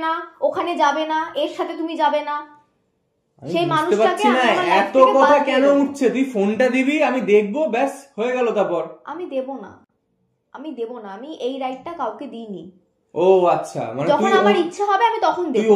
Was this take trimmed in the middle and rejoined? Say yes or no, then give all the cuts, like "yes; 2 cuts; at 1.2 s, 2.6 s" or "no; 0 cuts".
no; 0 cuts